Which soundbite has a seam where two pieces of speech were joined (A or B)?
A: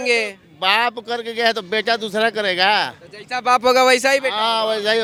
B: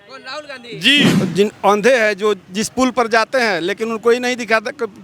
B